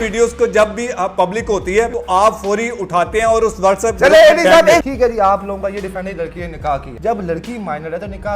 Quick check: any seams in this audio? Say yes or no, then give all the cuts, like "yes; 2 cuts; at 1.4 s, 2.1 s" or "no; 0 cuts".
yes; 3 cuts; at 2.0 s, 4.8 s, 6.9 s